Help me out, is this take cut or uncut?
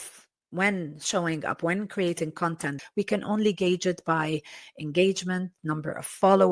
cut